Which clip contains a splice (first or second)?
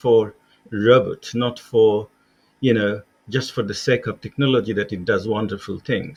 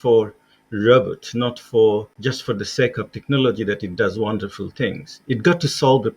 second